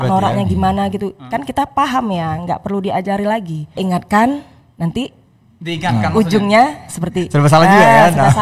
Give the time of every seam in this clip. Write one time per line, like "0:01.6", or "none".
0:03.8